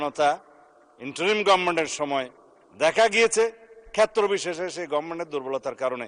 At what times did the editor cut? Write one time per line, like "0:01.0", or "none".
none